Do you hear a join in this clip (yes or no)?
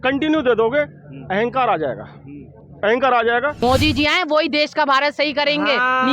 yes